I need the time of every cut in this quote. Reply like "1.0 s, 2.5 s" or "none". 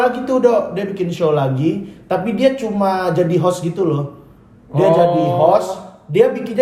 none